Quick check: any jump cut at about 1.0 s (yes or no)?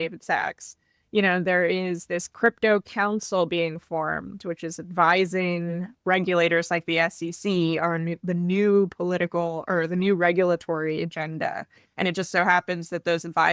no